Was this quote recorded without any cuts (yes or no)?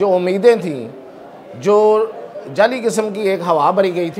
yes